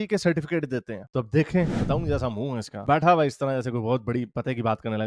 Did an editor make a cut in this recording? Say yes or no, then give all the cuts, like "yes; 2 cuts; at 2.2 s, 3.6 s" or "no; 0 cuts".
yes; 1 cut; at 1.8 s